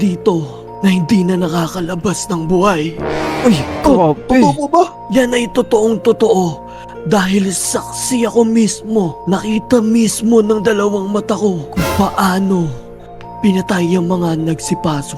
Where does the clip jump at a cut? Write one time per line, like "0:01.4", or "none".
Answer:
none